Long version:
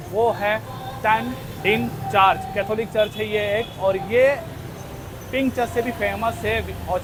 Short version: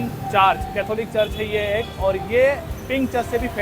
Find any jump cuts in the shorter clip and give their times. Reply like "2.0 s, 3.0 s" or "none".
2.7 s